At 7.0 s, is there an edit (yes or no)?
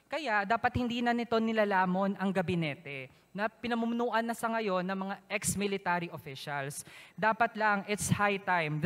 yes